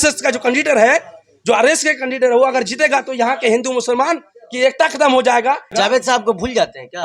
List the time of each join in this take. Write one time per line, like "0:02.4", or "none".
0:05.7